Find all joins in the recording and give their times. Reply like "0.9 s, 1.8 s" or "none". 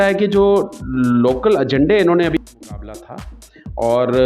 2.5 s